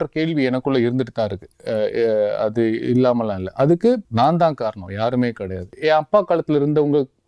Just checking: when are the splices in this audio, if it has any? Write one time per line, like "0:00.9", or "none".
0:04.1
0:05.7